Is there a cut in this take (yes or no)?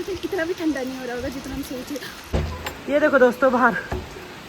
yes